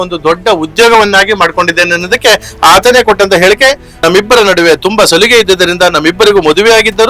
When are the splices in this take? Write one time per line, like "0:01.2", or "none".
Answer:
0:03.9